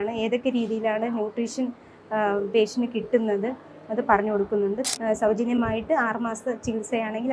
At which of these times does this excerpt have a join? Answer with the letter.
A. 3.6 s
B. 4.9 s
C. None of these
B